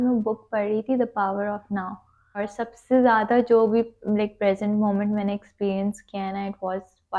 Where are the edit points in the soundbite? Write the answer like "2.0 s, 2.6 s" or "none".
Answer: 2.4 s